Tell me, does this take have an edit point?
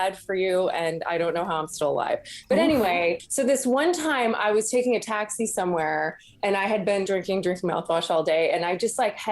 yes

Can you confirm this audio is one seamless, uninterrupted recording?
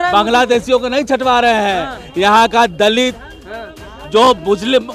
yes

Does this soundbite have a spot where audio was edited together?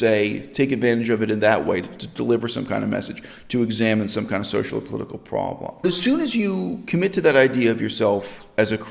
yes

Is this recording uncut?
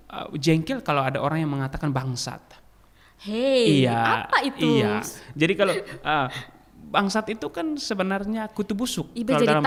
yes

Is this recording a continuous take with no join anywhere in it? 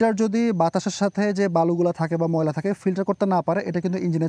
yes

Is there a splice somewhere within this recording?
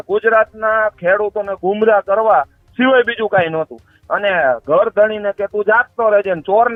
no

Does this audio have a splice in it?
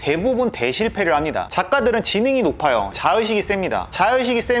yes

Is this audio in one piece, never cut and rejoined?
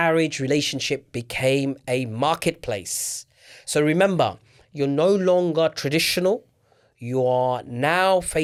yes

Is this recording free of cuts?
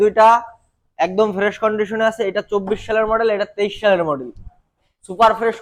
yes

